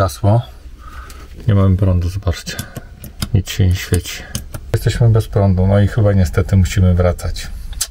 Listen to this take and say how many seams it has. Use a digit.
1